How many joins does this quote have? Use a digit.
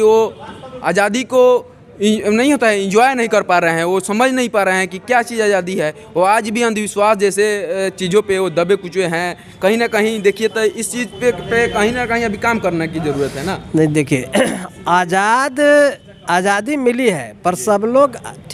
0